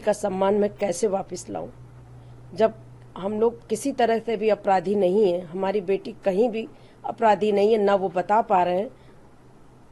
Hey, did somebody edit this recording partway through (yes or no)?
no